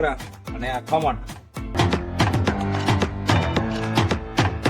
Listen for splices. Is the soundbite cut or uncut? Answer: cut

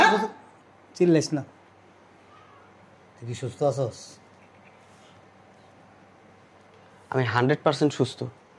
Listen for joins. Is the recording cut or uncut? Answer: uncut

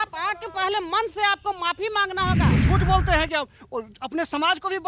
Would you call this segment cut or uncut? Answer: cut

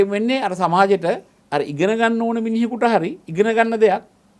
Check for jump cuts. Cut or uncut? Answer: cut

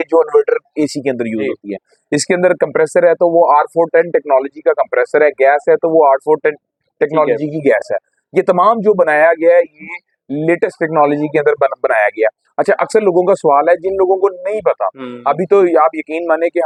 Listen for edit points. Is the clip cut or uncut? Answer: uncut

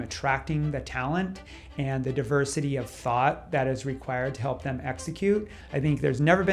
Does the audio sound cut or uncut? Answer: cut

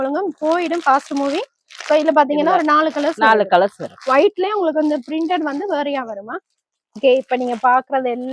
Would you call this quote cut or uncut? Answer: uncut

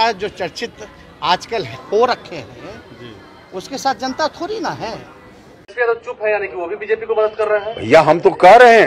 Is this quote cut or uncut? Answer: cut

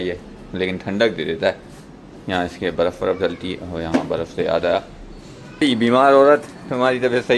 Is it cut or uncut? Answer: cut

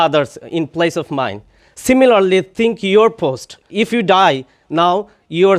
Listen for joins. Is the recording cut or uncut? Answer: cut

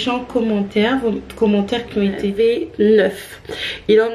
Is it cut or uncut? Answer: cut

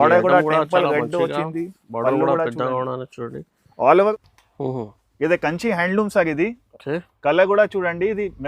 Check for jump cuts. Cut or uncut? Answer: cut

